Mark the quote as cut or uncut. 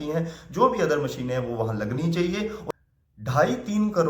cut